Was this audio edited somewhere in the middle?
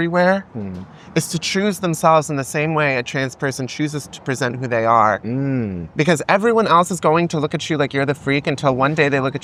no; 0 cuts

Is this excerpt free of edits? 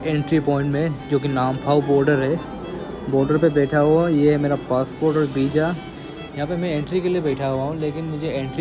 yes; 0 cuts

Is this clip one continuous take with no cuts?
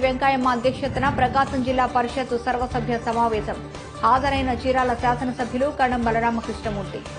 yes; 0 cuts

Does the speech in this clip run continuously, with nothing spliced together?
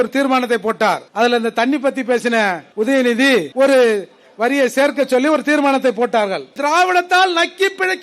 no; 4 cuts; at 1.1 s, 2.6 s, 3.5 s, 6.5 s

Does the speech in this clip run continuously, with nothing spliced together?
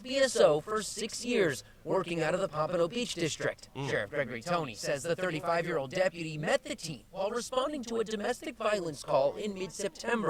yes; 0 cuts

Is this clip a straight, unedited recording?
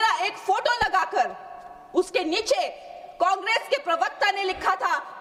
yes; 0 cuts

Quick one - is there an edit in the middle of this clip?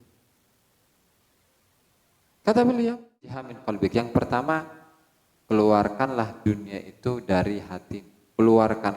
yes; 1 cut; at 3.6 s

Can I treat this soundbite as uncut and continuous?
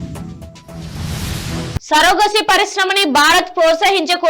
no; 1 cut; at 1.9 s

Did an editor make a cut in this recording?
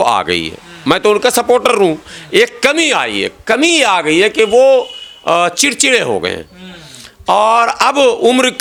no; 0 cuts

